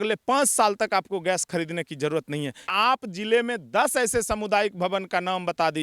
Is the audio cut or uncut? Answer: cut